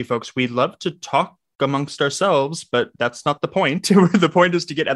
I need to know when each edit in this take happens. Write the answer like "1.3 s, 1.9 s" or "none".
none